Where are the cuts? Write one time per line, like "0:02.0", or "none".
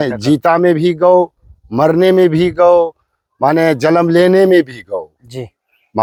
none